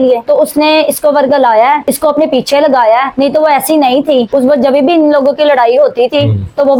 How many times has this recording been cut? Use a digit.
0